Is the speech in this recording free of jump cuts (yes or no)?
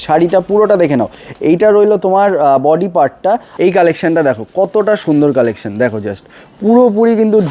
no